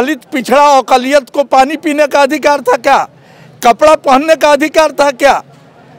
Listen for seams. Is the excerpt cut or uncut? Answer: uncut